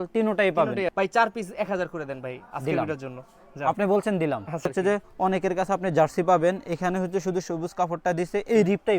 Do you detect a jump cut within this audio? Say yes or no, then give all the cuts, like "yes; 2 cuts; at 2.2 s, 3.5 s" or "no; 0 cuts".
yes; 2 cuts; at 0.9 s, 4.7 s